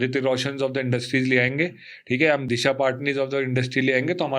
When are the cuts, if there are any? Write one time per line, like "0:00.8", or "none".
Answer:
0:02.4